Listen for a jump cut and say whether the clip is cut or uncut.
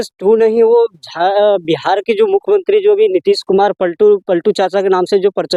uncut